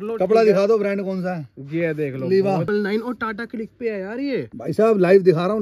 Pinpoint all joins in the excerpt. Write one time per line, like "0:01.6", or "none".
0:02.7

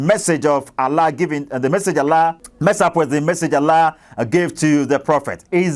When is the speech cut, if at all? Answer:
0:02.5

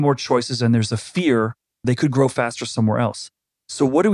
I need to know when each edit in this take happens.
0:01.8

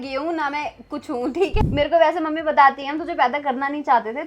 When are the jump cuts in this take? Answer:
0:01.5

